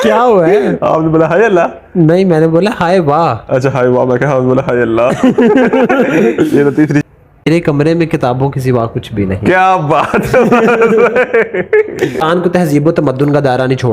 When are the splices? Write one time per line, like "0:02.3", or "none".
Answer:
0:07.0
0:12.2